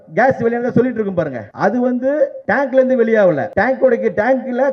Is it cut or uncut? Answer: cut